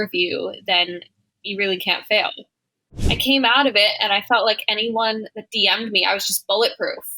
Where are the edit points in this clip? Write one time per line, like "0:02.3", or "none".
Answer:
0:02.8